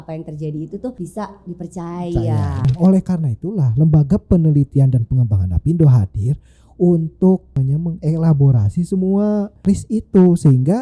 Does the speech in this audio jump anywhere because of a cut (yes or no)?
yes